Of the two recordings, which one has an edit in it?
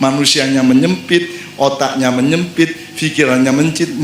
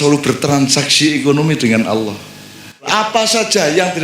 second; 1 cut; at 2.9 s

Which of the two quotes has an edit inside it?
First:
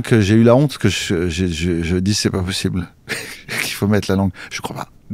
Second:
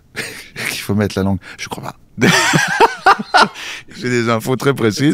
second; 1 cut; at 4.0 s

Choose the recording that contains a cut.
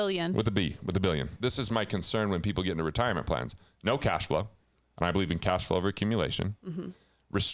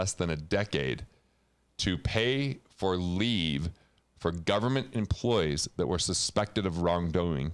first; 1 cut; at 1.3 s

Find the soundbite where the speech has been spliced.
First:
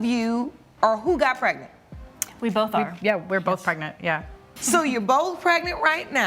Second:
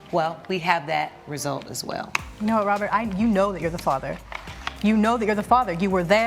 first; 1 cut; at 4.4 s

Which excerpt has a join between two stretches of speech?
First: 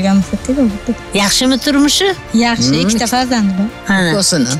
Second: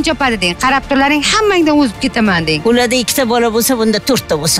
first; 1 cut; at 1.0 s

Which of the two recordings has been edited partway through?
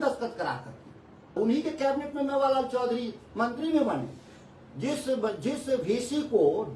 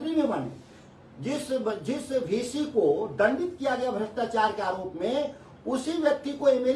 first; 1 cut; at 1.3 s

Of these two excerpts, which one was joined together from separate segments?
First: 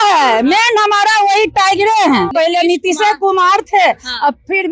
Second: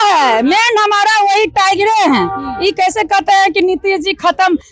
first; 1 cut; at 2.3 s

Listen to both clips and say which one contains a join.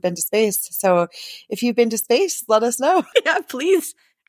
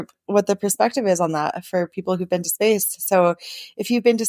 first; 1 cut; at 3.1 s

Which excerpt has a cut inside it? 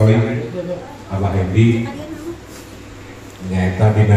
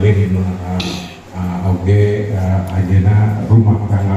second; 1 cut; at 1.2 s

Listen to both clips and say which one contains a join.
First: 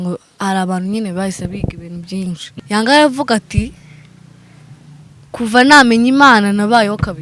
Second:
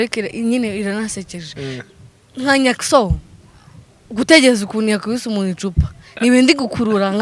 first; 1 cut; at 2.5 s

